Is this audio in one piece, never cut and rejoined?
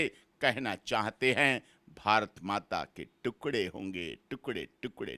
yes; 0 cuts

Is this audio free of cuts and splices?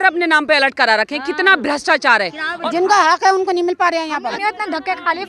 no; 2 cuts; at 2.5 s, 4.4 s

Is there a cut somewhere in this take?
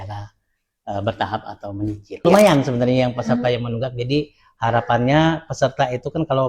yes; 1 cut; at 2.2 s

